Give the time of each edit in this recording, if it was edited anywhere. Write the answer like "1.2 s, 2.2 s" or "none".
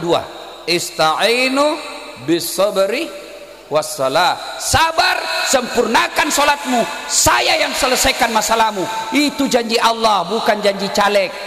none